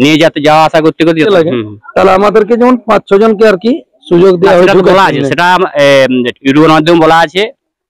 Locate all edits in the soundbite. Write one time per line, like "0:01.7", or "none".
0:01.3